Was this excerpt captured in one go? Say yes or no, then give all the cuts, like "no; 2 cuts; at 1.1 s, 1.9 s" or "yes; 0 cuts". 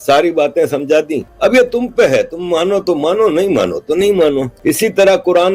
no; 2 cuts; at 1.2 s, 4.5 s